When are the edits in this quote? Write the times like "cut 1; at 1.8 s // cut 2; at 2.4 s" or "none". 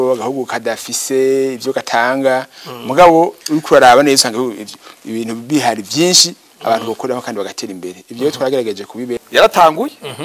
cut 1; at 9.2 s